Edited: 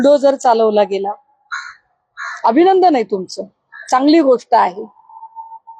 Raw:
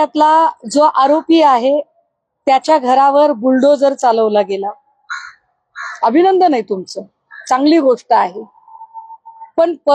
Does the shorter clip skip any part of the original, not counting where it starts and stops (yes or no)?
no